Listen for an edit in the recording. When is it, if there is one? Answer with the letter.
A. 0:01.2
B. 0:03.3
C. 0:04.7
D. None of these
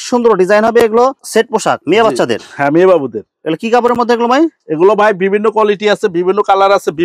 A